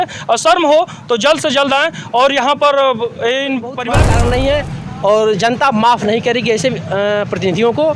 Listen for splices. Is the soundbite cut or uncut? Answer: cut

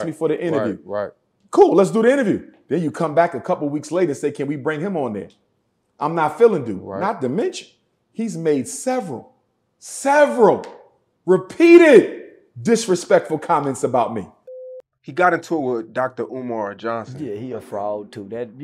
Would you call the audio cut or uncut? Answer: cut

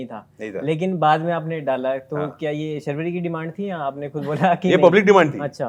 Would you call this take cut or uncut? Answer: uncut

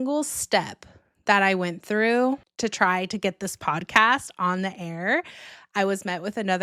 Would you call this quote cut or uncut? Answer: uncut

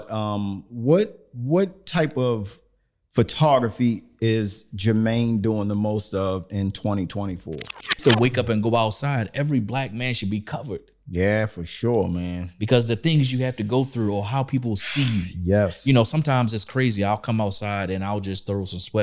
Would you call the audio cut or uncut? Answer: cut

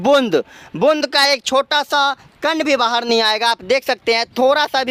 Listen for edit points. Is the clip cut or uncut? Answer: uncut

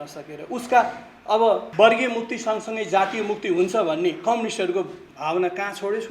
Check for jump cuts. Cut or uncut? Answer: cut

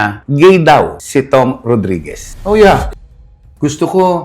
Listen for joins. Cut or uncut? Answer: cut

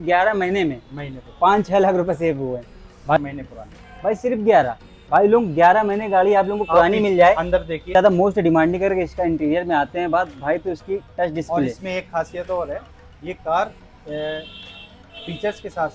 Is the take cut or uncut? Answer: cut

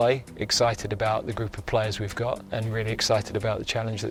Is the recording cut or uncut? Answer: uncut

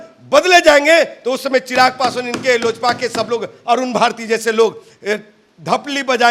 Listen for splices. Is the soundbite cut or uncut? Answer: uncut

